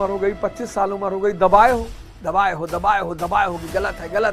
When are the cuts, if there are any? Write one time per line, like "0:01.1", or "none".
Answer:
none